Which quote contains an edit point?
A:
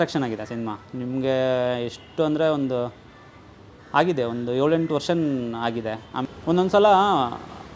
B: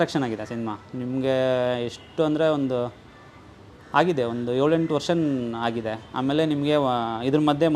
A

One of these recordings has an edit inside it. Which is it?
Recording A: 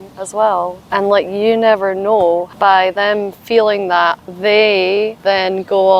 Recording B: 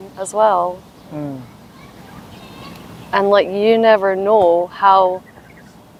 A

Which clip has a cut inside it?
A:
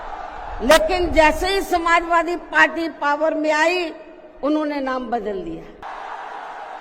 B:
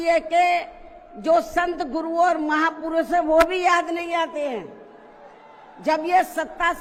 A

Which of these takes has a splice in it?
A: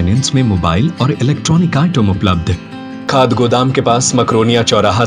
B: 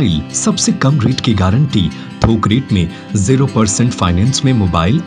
A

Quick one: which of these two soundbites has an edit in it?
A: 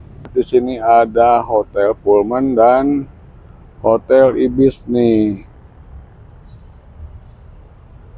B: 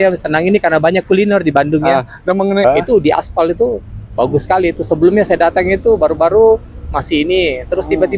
B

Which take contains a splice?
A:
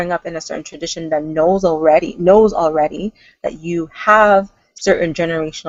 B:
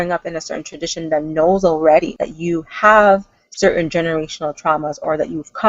B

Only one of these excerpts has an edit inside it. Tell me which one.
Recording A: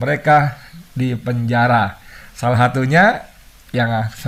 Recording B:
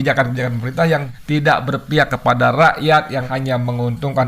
B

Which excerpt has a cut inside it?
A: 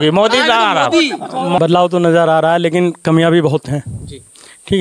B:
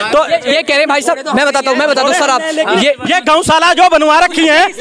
A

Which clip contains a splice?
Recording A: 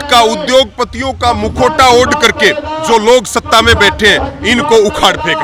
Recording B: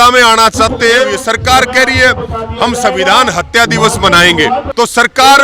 B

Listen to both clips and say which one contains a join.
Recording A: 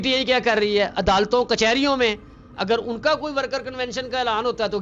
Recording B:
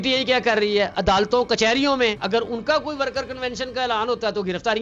B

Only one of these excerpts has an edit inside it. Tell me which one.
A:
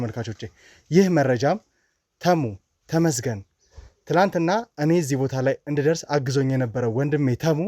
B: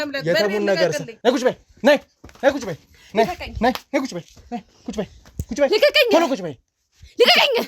B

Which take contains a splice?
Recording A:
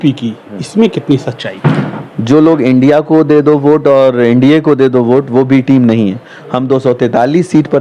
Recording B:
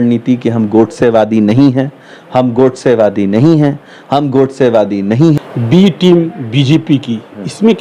B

